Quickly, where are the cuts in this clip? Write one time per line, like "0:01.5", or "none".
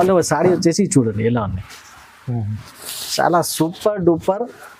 none

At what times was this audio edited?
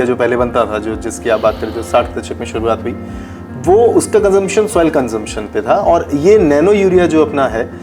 none

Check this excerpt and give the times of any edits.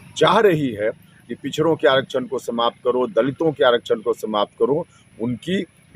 none

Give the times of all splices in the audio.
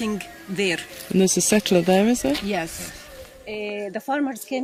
none

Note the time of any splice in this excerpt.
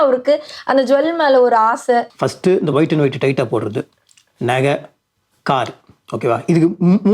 0:02.2

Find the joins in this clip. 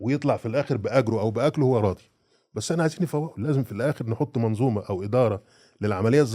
none

